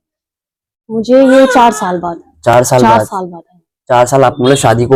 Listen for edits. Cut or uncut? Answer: uncut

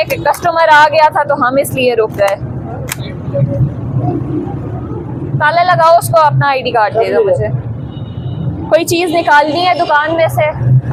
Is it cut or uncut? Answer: uncut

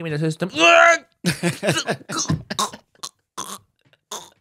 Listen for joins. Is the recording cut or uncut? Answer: uncut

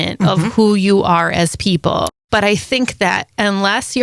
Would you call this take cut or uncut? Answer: cut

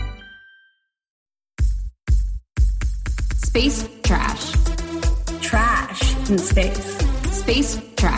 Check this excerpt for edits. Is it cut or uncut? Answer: cut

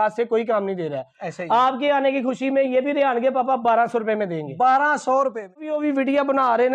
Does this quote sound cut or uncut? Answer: cut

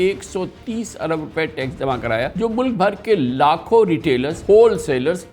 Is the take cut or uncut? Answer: cut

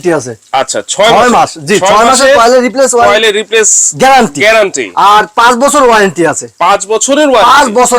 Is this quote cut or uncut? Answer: uncut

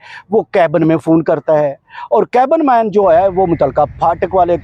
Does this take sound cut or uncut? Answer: uncut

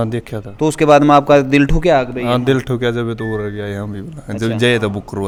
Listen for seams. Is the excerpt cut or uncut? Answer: uncut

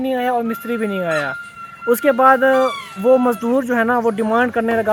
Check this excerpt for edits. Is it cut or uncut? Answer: uncut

